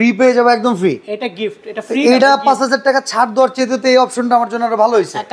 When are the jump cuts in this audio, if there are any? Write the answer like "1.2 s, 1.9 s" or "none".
none